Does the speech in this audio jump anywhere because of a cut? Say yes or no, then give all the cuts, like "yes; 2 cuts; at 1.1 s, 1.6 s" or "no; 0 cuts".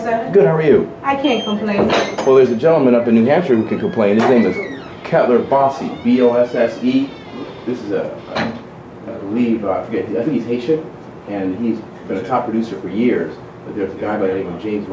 no; 0 cuts